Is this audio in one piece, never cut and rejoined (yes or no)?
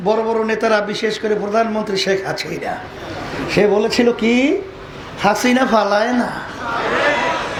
yes